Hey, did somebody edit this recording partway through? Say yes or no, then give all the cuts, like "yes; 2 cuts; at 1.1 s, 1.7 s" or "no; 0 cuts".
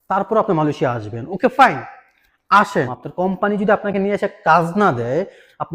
yes; 1 cut; at 3.0 s